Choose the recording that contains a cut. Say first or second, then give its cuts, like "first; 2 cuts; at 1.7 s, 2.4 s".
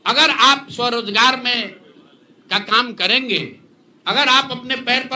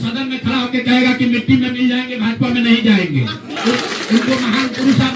second; 1 cut; at 3.5 s